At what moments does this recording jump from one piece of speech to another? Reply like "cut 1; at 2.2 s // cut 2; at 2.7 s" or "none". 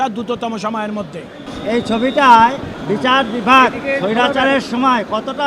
cut 1; at 1.4 s // cut 2; at 2.7 s

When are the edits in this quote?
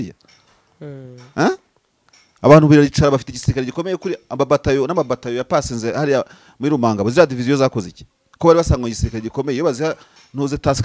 none

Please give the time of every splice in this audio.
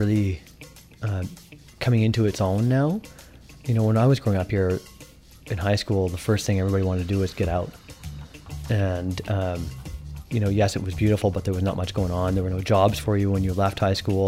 none

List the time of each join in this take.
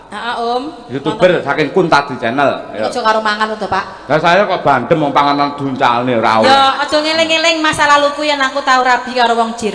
none

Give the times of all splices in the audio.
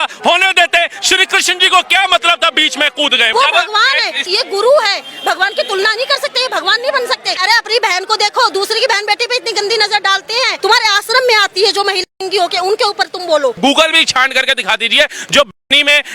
cut 1; at 3.3 s // cut 2; at 4.2 s // cut 3; at 7.4 s // cut 4; at 10.6 s // cut 5; at 13.6 s

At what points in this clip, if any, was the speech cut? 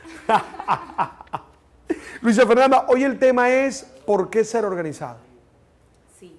cut 1; at 2.0 s

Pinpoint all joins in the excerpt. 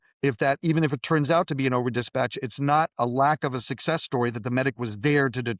none

